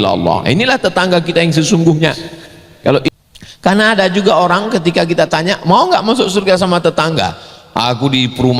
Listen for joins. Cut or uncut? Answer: cut